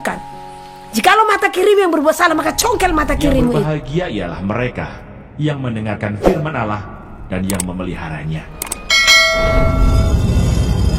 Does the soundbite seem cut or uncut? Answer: cut